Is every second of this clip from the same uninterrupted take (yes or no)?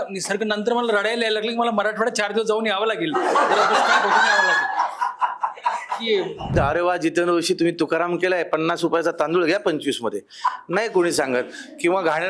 no